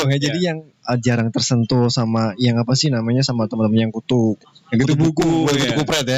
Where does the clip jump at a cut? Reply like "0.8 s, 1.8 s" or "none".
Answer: none